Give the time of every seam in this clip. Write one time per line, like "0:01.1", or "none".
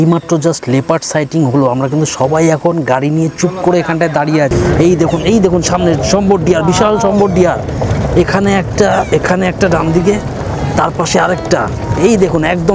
0:04.5